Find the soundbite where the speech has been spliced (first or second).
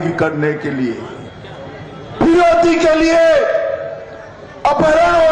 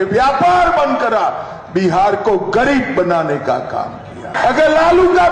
second